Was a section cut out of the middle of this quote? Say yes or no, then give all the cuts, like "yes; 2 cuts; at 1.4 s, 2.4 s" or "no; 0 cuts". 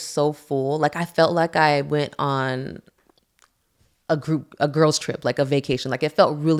no; 0 cuts